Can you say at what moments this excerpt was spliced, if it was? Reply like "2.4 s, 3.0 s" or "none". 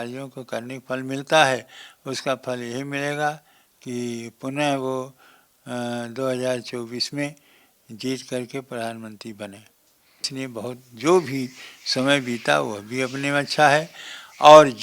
10.3 s